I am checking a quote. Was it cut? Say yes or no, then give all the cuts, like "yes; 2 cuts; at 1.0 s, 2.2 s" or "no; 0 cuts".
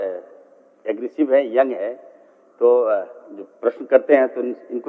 no; 0 cuts